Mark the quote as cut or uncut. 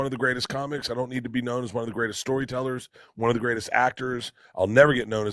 uncut